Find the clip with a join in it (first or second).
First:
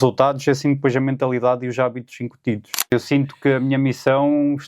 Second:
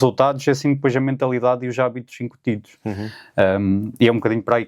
first